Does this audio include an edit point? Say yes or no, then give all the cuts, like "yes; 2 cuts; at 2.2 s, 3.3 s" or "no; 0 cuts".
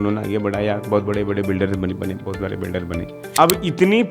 yes; 1 cut; at 3.2 s